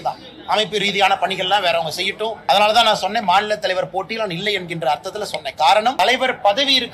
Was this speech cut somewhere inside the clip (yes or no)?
yes